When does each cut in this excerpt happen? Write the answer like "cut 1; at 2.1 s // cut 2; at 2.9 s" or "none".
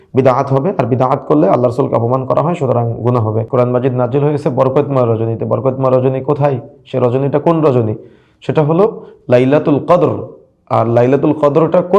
cut 1; at 3.4 s